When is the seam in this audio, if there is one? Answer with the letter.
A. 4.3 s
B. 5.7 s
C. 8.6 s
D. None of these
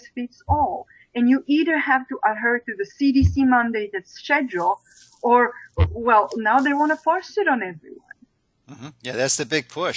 D